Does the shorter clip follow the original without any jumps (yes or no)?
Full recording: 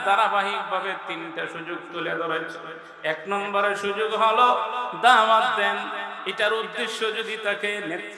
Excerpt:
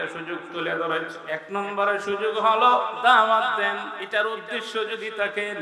no